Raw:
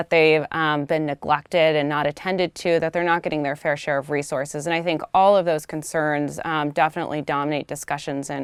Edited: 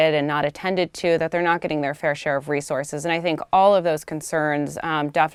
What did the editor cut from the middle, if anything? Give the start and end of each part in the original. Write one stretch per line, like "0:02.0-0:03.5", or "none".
none